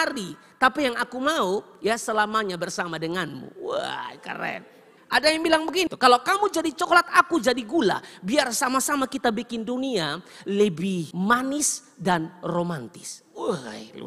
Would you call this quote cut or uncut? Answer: uncut